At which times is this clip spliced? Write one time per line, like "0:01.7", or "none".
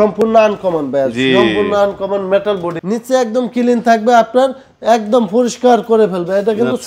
0:02.7